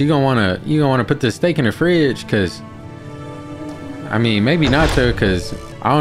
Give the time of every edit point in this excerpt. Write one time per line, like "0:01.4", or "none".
none